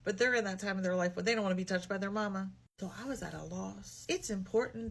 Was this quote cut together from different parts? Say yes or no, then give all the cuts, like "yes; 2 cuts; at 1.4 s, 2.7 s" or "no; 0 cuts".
no; 0 cuts